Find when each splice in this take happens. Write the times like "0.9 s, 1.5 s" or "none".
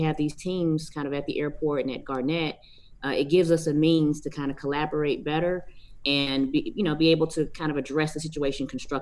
none